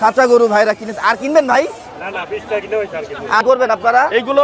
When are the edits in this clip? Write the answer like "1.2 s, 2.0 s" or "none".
3.4 s